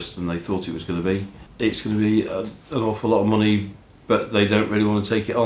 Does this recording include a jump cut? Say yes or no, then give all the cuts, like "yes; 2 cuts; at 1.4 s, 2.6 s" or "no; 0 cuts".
yes; 1 cut; at 1.4 s